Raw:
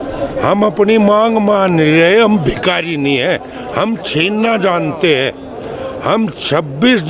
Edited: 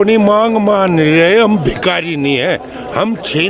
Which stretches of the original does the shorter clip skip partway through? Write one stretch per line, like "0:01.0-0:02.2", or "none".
none

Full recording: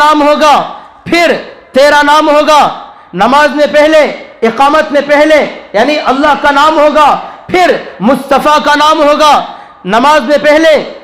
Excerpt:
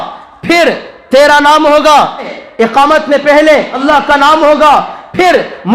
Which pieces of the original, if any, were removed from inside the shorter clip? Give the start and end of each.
0:03.0-0:04.2
0:05.6-0:06.1

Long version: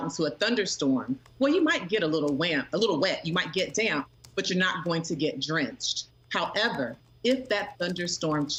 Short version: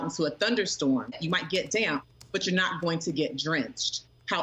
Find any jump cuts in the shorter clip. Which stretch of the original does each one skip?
0:01.2-0:03.2

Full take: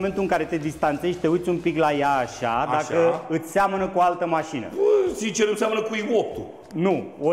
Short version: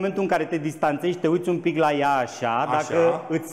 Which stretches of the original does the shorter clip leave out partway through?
none

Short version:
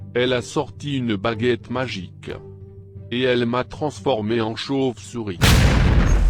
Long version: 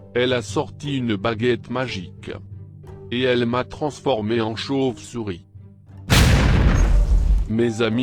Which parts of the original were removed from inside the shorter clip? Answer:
0:05.3-0:06.0

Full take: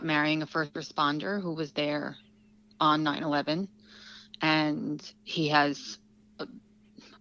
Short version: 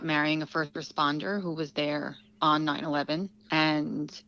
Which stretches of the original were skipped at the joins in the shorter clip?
0:02.2-0:02.6
0:03.8-0:04.3

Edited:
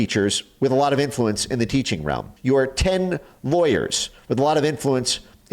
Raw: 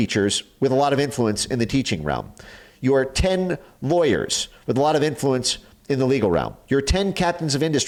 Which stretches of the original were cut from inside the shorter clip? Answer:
0:02.3-0:02.7

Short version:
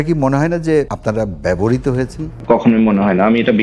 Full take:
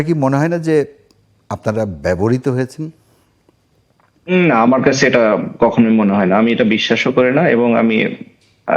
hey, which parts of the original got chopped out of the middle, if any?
0:00.9-0:01.5
0:03.0-0:05.5

